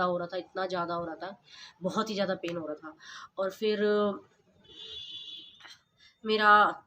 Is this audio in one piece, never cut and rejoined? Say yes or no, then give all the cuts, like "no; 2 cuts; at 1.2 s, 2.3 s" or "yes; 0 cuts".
yes; 0 cuts